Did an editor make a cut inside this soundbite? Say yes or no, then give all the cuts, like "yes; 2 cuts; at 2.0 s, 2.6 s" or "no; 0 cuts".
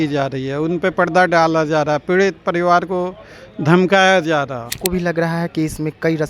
yes; 1 cut; at 4.7 s